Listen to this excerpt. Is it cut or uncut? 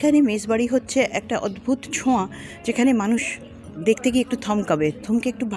uncut